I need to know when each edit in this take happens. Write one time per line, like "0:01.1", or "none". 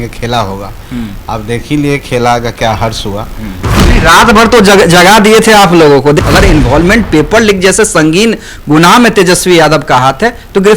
0:06.2